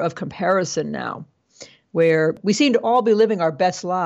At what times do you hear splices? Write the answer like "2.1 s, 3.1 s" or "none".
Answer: 2.4 s